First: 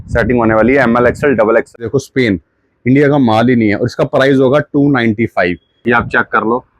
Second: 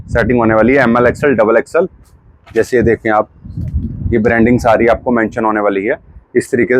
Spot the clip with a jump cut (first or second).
first